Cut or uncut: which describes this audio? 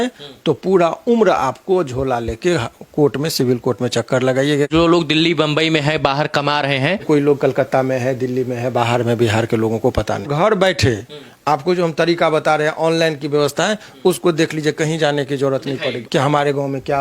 cut